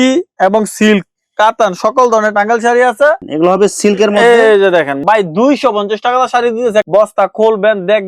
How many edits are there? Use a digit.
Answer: 2